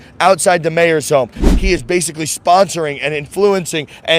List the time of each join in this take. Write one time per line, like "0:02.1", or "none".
0:01.5